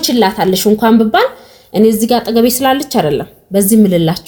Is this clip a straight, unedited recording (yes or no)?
yes